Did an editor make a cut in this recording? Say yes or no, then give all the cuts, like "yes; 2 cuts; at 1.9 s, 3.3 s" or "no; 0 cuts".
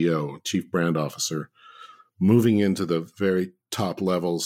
no; 0 cuts